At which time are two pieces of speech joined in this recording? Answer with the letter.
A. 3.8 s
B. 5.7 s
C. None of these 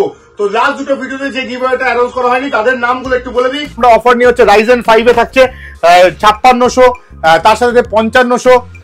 A